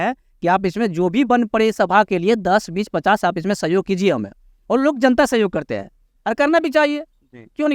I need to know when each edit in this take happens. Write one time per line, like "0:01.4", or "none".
none